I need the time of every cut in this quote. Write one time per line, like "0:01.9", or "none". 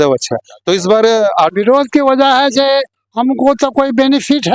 0:01.5